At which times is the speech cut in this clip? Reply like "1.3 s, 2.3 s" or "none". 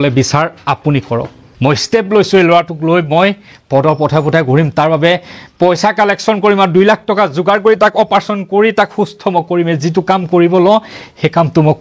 1.4 s